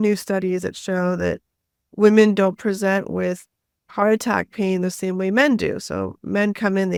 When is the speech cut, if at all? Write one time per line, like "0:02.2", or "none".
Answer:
none